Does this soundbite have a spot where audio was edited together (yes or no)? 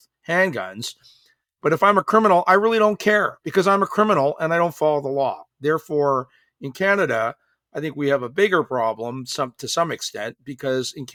no